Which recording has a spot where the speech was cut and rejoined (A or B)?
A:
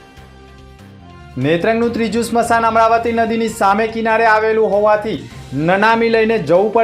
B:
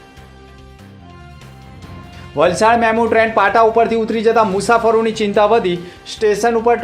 B